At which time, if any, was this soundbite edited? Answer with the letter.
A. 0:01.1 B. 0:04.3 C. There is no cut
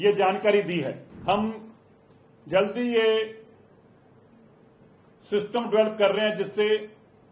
A